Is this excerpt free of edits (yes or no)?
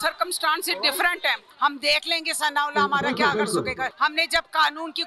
no